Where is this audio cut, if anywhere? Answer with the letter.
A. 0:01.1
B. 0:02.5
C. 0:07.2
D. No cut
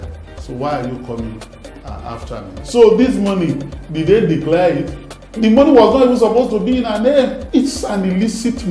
B